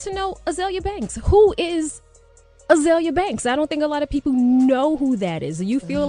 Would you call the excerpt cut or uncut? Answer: cut